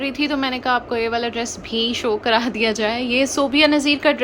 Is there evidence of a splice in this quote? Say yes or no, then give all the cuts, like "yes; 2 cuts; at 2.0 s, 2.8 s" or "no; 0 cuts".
no; 0 cuts